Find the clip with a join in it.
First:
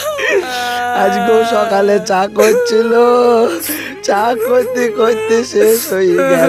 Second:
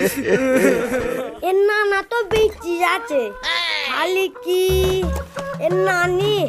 second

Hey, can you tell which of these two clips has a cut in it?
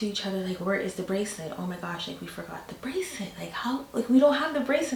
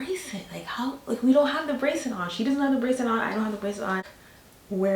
second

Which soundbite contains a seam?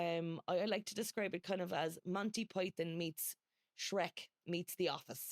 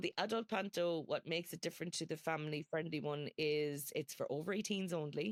first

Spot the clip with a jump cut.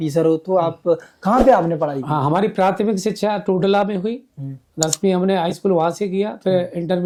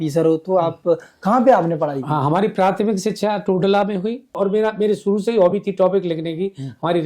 second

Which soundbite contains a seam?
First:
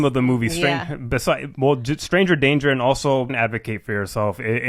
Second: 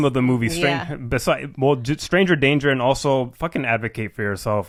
first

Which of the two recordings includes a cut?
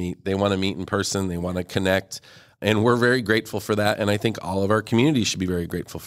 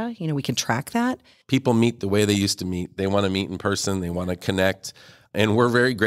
second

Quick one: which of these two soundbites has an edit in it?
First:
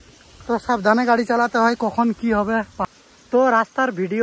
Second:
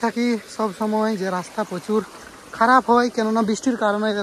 first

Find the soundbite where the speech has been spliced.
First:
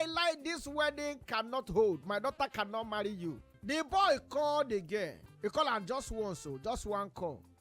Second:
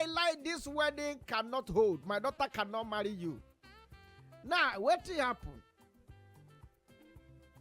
first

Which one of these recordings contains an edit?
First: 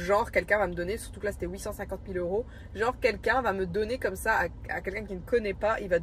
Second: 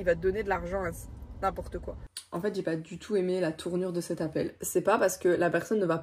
second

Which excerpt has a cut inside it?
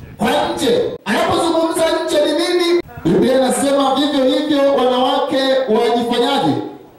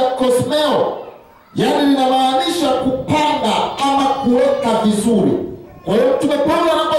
first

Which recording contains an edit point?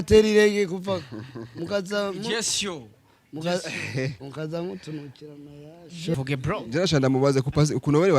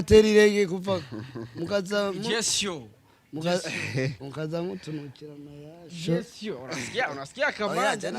first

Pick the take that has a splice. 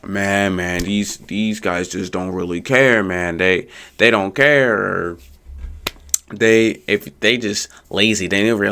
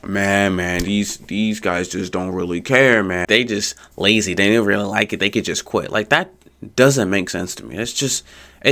second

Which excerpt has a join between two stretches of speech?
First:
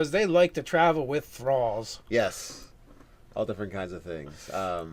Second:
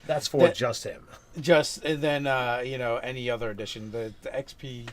second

